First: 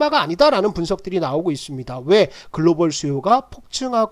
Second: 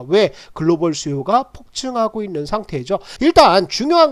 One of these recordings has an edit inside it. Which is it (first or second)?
second